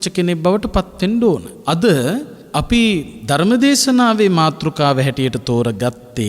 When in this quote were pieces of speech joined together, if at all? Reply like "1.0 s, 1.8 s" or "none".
1.5 s